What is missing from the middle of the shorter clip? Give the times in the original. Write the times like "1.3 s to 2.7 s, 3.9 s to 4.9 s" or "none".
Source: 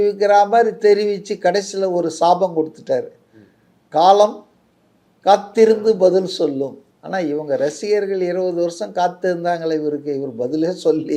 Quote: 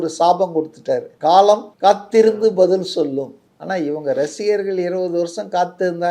3.1 s to 3.8 s, 4.4 s to 5.1 s